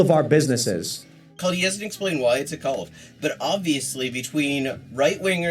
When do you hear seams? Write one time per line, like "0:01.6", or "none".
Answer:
0:01.3